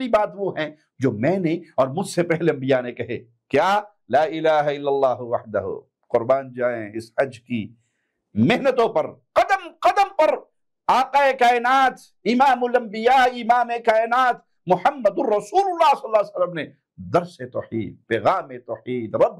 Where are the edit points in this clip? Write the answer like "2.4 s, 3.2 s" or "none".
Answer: none